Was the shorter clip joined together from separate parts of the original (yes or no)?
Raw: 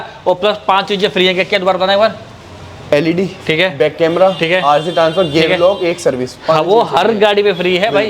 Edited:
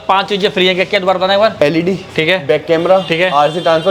yes